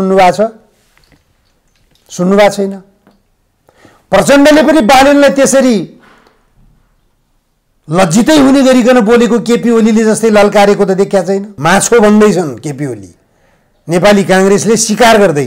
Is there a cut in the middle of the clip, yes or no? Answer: yes